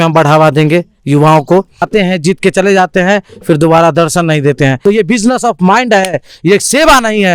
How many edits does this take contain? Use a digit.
2